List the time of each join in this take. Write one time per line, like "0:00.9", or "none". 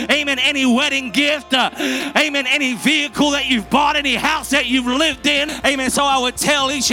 0:05.5